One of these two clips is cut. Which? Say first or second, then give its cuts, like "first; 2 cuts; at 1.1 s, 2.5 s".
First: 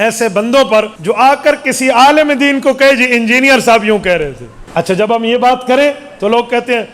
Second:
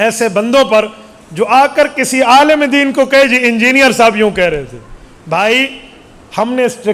first; 2 cuts; at 0.9 s, 5.1 s